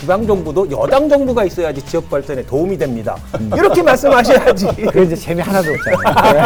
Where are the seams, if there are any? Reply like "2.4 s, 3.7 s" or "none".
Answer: none